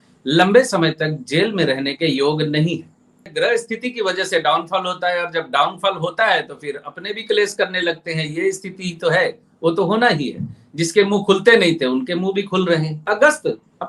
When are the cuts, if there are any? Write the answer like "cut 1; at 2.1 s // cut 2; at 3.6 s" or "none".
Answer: cut 1; at 3.3 s // cut 2; at 13.0 s